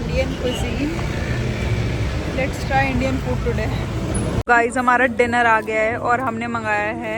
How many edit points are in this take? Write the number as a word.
one